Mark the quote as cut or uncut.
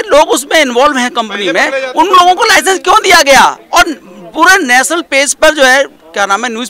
uncut